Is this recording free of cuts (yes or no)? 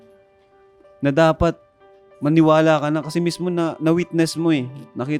yes